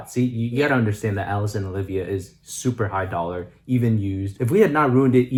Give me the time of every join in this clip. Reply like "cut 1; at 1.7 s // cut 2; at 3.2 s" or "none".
none